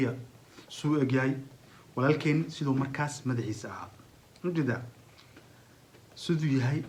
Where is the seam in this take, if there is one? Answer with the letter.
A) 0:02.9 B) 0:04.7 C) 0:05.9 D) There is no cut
D